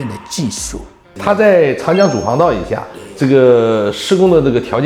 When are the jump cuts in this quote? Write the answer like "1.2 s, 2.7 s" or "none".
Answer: 1.1 s